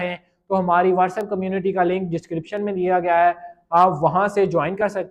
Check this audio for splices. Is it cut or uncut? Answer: uncut